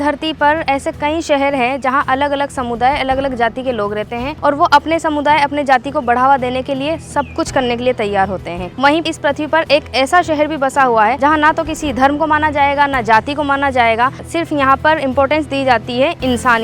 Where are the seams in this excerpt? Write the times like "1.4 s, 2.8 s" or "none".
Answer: 4.3 s, 9.0 s, 11.2 s, 14.2 s

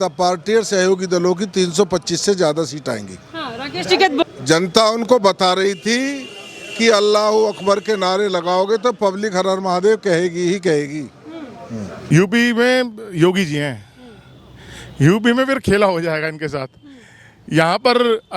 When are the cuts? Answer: 4.2 s, 12.0 s

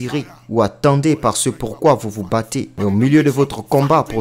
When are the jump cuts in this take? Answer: 2.6 s

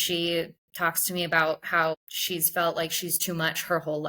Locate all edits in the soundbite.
2.0 s

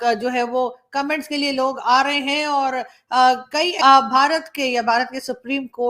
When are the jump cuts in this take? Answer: 3.7 s

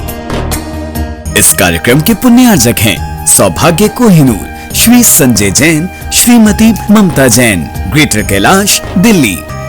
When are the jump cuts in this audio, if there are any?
1.2 s

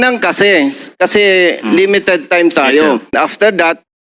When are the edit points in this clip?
3.1 s

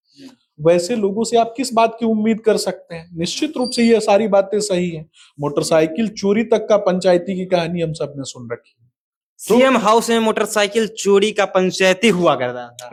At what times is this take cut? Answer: none

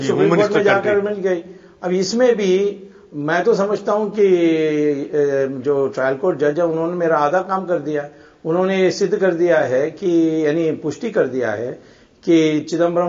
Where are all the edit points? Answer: none

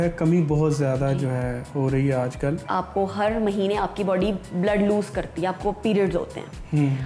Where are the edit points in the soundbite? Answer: 2.7 s

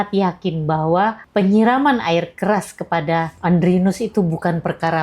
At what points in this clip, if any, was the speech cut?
1.2 s, 3.3 s

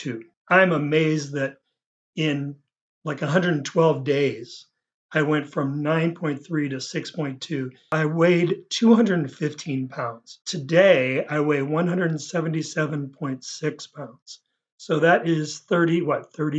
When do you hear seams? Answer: 10.5 s

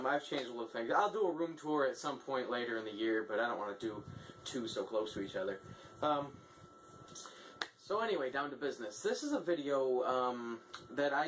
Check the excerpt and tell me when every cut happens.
4.0 s

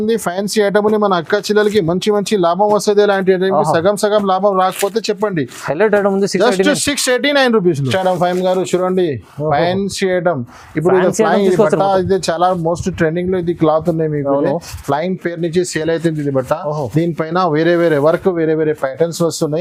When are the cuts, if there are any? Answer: none

